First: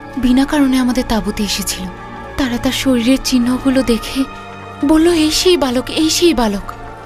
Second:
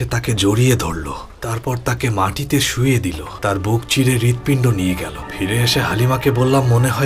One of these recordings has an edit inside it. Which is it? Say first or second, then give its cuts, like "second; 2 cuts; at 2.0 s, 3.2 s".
second; 3 cuts; at 1.3 s, 3.3 s, 5.2 s